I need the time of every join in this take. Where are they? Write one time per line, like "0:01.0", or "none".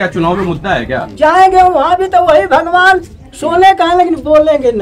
0:01.0